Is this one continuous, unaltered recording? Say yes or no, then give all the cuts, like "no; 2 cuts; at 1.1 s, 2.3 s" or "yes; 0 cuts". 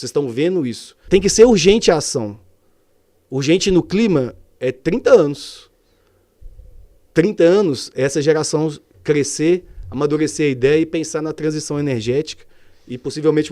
no; 1 cut; at 1.0 s